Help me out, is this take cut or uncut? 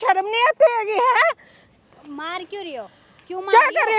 uncut